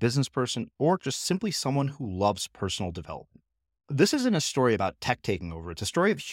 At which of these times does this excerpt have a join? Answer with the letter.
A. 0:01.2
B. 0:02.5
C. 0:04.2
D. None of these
D